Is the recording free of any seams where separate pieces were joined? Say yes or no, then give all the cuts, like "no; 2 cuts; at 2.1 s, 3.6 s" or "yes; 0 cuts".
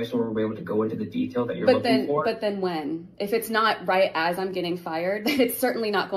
yes; 0 cuts